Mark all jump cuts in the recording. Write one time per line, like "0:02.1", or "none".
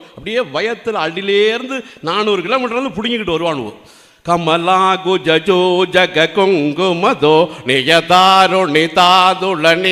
none